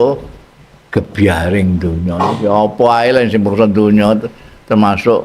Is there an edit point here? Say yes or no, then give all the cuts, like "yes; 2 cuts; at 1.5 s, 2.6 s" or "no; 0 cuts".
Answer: no; 0 cuts